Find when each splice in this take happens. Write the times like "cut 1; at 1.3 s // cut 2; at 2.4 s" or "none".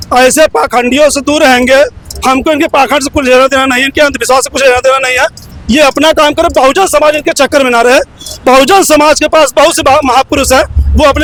none